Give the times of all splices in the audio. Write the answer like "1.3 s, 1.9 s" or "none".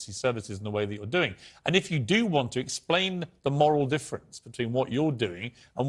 none